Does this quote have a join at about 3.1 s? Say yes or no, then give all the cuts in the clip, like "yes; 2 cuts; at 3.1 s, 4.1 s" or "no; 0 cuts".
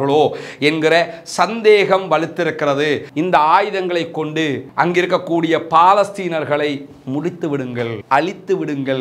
yes; 1 cut; at 3.1 s